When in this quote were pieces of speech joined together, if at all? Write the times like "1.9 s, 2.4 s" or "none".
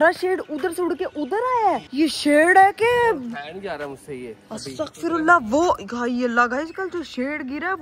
none